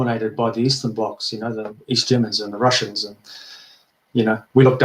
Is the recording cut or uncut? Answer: uncut